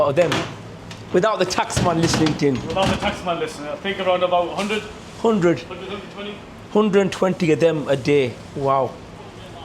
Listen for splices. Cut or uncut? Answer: uncut